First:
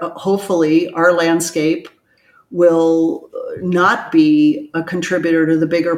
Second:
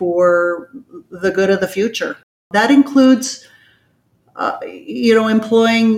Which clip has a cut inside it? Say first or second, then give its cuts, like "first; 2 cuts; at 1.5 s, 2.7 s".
second; 1 cut; at 2.4 s